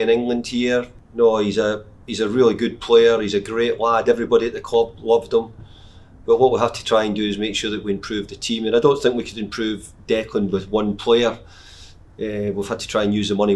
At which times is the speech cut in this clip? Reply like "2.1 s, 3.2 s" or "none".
1.0 s